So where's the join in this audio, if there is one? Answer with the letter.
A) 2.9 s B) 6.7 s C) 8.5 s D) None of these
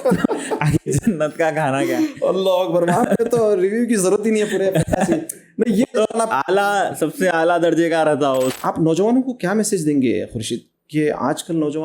C